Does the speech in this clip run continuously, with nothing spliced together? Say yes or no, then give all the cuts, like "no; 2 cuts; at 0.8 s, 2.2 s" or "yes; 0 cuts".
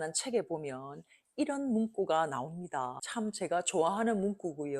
no; 1 cut; at 3.0 s